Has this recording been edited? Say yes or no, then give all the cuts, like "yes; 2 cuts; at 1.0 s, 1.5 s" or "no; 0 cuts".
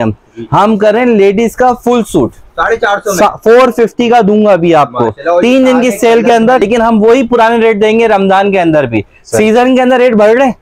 yes; 1 cut; at 6.6 s